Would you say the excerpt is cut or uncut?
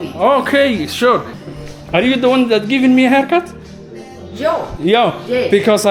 cut